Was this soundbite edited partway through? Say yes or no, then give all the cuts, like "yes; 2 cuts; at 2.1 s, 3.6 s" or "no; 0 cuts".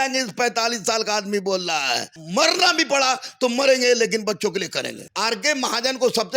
yes; 2 cuts; at 2.2 s, 5.0 s